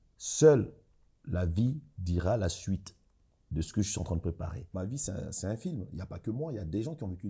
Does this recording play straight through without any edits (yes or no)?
no